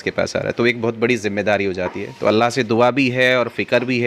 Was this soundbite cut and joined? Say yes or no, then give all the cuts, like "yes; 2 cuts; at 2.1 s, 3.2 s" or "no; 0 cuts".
no; 0 cuts